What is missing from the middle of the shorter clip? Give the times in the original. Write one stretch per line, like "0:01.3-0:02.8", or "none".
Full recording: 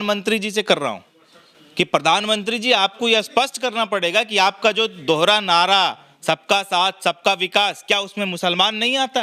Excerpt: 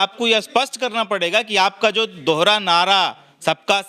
none